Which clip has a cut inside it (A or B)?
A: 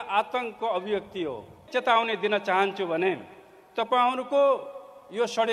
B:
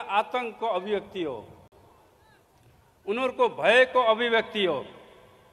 A